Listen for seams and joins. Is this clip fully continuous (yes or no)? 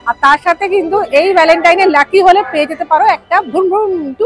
yes